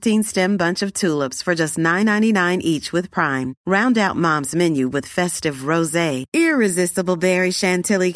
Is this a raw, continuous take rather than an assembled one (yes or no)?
yes